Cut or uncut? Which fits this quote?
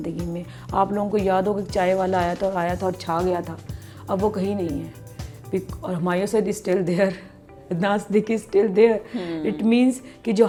uncut